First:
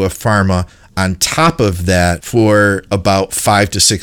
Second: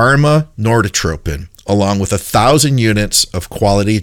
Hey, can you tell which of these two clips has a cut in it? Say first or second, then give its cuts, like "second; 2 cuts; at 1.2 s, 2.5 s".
first; 1 cut; at 2.2 s